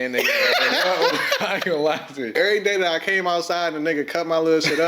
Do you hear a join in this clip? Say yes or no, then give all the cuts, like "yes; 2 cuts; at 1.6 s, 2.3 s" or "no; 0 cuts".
yes; 1 cut; at 2.3 s